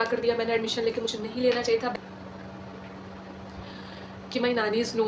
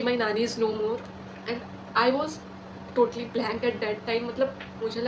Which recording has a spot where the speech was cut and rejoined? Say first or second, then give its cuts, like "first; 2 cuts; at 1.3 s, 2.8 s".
first; 1 cut; at 1.9 s